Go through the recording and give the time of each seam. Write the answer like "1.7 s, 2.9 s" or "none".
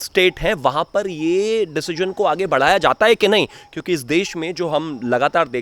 none